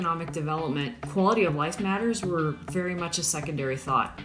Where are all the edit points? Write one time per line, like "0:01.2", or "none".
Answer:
0:01.0